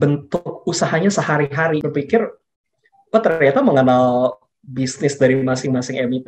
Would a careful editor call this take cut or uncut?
cut